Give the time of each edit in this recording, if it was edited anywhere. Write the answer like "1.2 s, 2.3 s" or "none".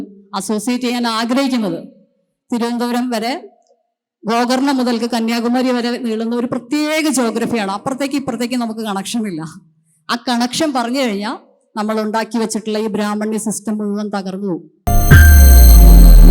14.9 s